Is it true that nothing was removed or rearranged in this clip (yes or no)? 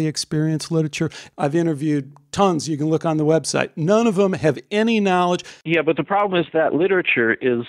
no